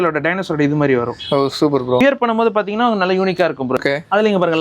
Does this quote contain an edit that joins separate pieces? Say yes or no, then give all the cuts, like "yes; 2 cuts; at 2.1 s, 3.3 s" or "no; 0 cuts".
yes; 2 cuts; at 2.0 s, 3.8 s